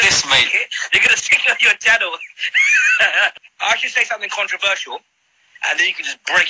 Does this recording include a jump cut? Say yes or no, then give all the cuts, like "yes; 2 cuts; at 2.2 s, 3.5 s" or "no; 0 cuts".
yes; 1 cut; at 3.3 s